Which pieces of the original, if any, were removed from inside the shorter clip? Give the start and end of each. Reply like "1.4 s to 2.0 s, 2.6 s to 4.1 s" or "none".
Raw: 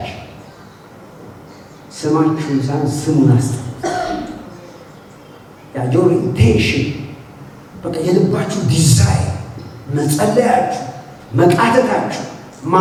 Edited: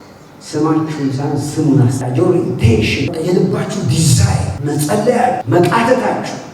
3.5 s to 5.8 s, 6.9 s to 7.9 s, 9.3 s to 9.8 s, 10.7 s to 11.3 s